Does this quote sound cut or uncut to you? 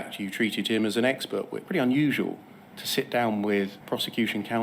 cut